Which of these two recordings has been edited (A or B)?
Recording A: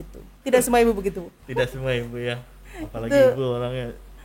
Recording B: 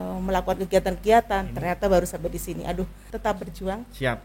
B